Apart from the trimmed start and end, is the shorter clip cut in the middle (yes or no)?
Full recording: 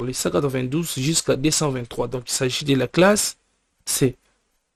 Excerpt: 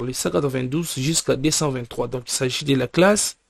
no